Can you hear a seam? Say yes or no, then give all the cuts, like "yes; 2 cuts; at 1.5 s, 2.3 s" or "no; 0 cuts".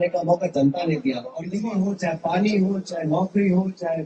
yes; 1 cut; at 1.6 s